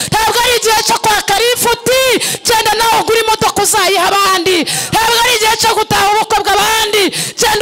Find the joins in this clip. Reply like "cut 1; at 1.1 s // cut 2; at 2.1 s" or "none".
none